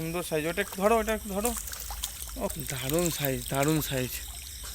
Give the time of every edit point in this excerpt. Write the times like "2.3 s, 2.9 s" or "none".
2.5 s